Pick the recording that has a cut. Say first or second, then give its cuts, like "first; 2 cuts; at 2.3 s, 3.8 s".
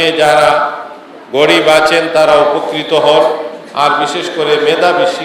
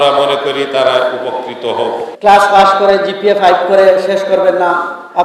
second; 1 cut; at 2.1 s